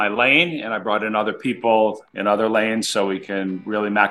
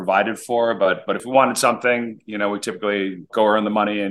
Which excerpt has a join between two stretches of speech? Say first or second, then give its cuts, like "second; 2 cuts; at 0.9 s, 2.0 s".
second; 2 cuts; at 1.2 s, 3.3 s